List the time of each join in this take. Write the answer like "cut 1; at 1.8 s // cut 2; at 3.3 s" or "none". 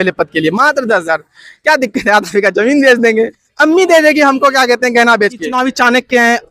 cut 1; at 5.5 s

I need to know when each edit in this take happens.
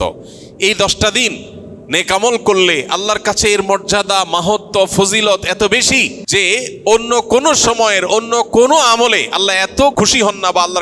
cut 1; at 6.2 s // cut 2; at 9.9 s

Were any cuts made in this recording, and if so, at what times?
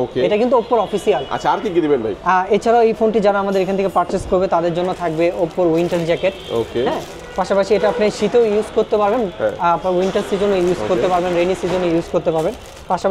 none

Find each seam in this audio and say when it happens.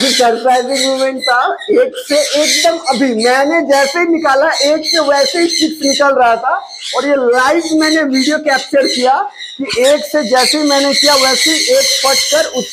none

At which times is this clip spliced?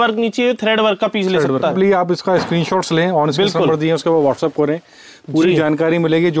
cut 1; at 1.7 s

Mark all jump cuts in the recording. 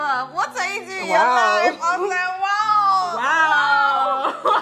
cut 1; at 1.8 s

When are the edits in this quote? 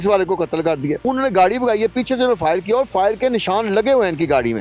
cut 1; at 1.0 s

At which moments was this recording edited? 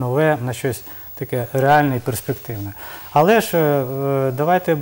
none

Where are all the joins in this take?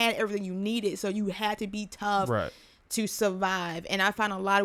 none

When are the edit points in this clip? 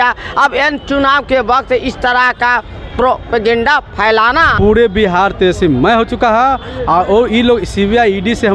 cut 1; at 4.5 s

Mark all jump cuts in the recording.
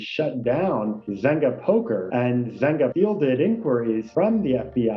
cut 1; at 2.6 s

